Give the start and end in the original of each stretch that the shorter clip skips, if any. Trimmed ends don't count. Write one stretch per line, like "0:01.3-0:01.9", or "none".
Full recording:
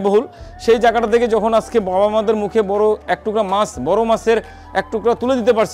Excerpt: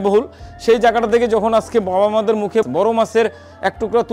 0:02.7-0:03.8